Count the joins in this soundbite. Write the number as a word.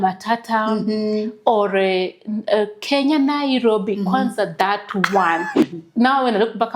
one